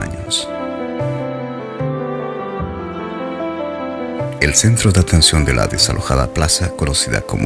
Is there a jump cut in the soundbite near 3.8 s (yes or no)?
yes